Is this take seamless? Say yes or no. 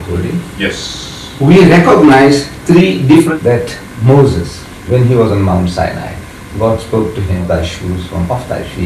no